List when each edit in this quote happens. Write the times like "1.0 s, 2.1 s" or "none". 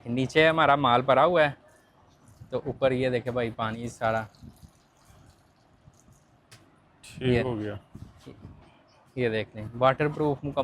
none